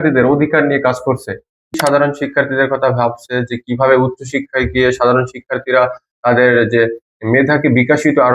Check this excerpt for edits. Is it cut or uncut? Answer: cut